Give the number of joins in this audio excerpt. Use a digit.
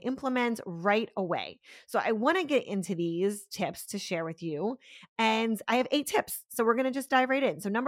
0